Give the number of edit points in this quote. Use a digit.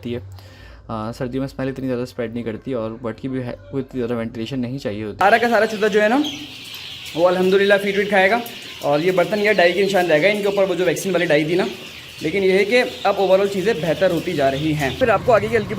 2